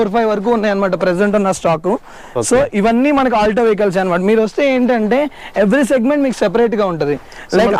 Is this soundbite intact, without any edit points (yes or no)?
yes